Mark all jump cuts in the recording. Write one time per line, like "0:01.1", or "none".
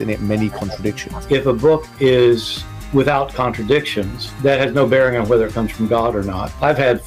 0:01.4